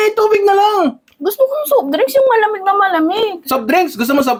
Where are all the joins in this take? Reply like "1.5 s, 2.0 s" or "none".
none